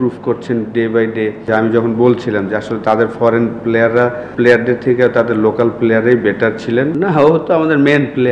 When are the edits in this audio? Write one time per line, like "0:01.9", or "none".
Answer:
0:01.5
0:04.2
0:06.9